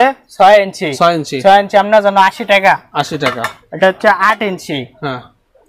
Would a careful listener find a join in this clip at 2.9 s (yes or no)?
no